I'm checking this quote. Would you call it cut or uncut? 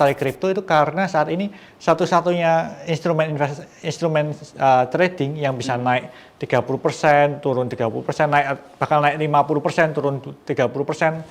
uncut